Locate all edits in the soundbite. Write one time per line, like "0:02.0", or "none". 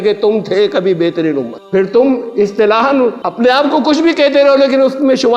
0:03.2